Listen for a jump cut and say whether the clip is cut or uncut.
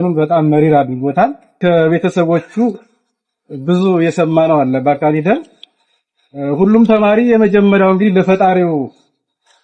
cut